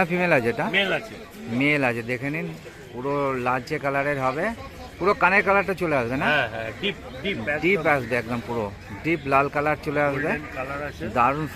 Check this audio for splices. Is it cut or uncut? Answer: uncut